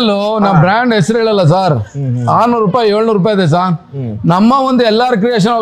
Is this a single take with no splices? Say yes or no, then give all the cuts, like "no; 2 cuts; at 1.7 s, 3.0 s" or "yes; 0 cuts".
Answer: yes; 0 cuts